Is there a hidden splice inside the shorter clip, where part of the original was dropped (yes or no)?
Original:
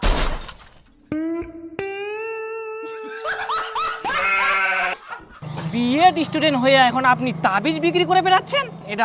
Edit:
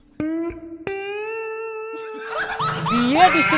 yes